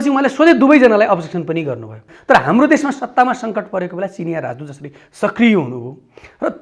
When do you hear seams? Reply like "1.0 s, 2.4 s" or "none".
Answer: 2.1 s